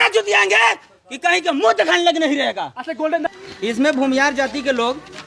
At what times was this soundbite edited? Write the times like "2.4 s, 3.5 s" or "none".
3.3 s